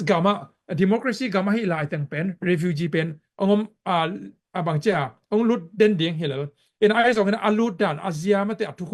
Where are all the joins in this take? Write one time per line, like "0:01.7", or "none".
none